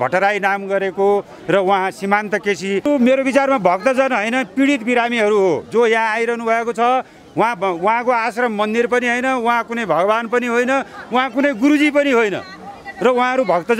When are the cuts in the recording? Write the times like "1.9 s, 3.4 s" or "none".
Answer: 2.8 s